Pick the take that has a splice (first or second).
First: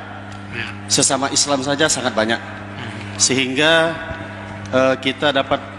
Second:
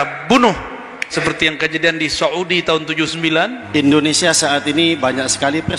second